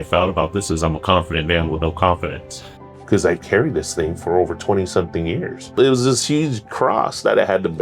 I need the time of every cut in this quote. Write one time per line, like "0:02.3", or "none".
0:02.9
0:05.7